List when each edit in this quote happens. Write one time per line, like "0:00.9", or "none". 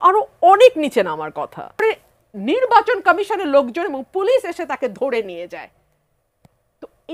0:01.8